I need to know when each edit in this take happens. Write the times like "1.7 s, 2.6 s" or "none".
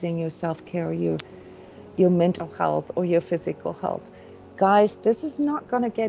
none